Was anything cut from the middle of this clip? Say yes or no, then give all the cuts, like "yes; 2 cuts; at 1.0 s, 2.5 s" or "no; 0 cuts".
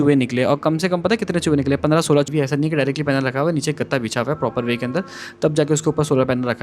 yes; 1 cut; at 2.3 s